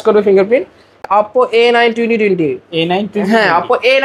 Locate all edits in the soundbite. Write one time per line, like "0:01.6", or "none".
0:01.1

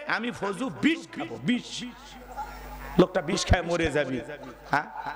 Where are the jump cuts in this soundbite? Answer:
none

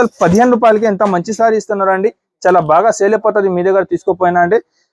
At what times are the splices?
none

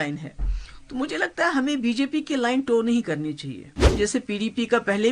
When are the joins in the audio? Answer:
0:04.0

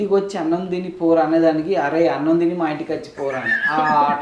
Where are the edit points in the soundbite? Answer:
none

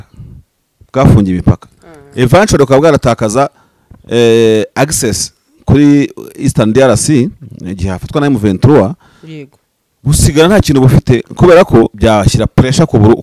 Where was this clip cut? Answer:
0:11.9

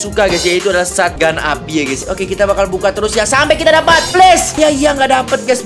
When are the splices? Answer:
0:02.0

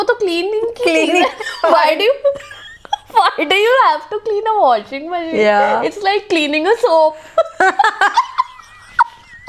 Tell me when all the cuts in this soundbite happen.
none

